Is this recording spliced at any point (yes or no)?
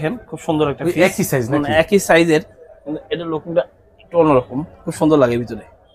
no